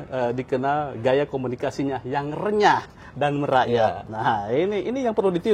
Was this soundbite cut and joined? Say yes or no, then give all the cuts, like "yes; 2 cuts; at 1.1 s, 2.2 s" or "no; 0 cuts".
no; 0 cuts